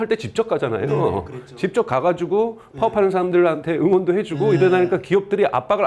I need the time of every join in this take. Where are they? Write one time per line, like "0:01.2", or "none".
none

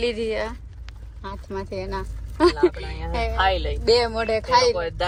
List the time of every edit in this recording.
none

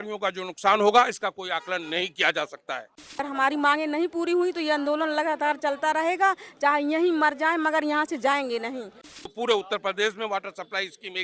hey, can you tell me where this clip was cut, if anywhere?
0:03.1
0:09.2

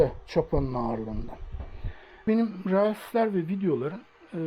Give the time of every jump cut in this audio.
0:02.3

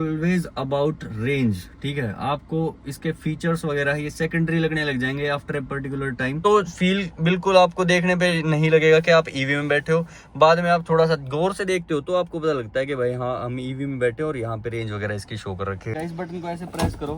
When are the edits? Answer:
0:06.4
0:15.9

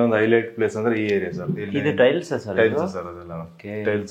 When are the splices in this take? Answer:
0:01.6

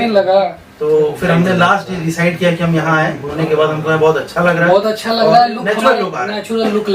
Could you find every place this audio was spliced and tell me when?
0:03.3

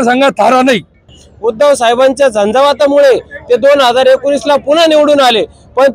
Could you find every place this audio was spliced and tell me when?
0:01.2

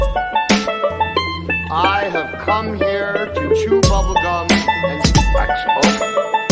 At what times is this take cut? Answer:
0:01.1

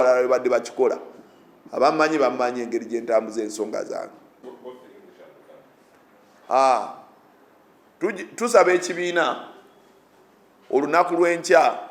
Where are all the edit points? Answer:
0:04.3

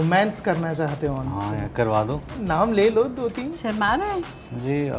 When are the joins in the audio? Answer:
0:02.3

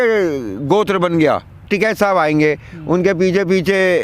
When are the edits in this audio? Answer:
0:01.6

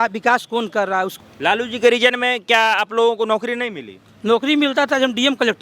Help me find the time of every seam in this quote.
0:01.1

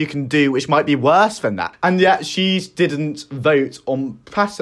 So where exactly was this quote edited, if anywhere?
0:01.7

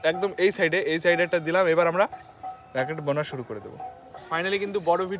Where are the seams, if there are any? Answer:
0:04.2

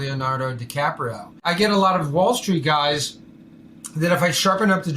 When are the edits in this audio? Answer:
0:01.5

